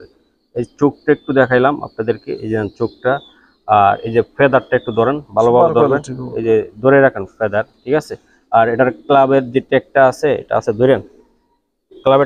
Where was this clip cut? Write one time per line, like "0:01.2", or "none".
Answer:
none